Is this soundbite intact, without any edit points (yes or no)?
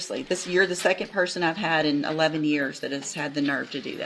yes